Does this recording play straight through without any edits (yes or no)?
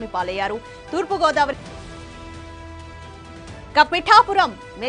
no